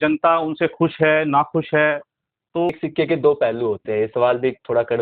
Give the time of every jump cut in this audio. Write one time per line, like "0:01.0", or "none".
0:02.8

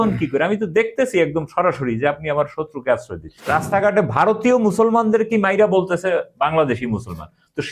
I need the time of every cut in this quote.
0:03.4

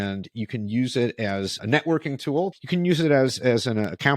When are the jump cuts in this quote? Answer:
0:01.6
0:02.6

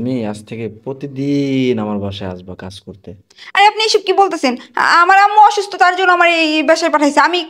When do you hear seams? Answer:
none

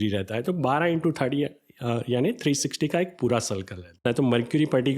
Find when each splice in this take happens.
0:04.0

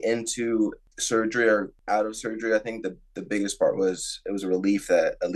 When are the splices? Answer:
0:00.9
0:01.7

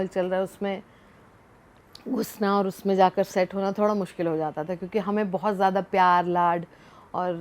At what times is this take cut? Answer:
none

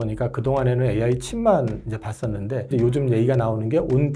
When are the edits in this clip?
0:02.7

